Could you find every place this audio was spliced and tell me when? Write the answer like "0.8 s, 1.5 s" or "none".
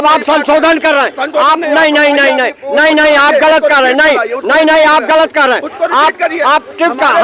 none